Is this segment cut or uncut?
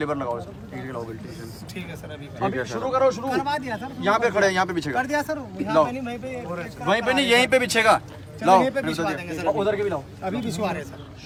uncut